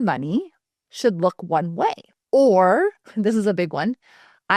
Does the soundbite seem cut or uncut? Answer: cut